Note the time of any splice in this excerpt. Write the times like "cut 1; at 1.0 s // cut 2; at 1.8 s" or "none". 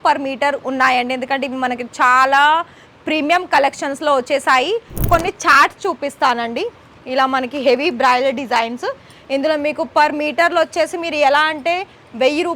cut 1; at 5.1 s

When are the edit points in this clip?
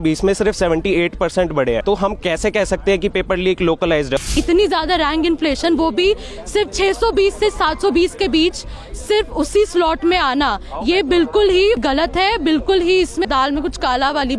cut 1; at 1.8 s // cut 2; at 4.3 s // cut 3; at 11.8 s // cut 4; at 13.3 s

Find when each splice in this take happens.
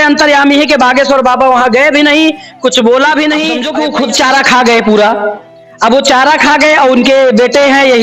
cut 1; at 3.7 s

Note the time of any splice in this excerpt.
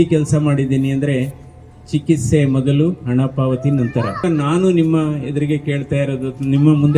cut 1; at 4.2 s

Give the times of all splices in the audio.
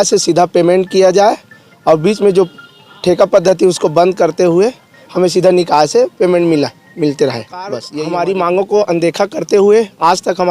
cut 1; at 7.8 s

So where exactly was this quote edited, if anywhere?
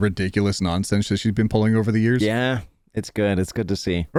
none

